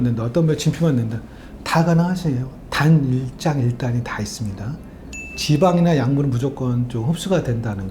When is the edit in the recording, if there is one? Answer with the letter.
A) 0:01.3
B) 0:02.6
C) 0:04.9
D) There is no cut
B